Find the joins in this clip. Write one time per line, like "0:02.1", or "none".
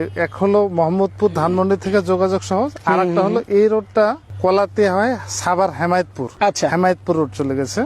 0:04.3
0:06.2